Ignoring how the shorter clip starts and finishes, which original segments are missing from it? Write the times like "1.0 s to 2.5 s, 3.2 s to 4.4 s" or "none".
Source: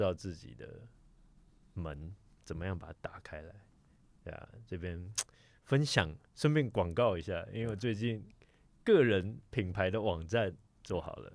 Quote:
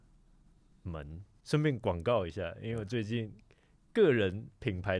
2.2 s to 6.2 s